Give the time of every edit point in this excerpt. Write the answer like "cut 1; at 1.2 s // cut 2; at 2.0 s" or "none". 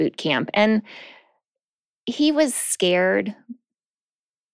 none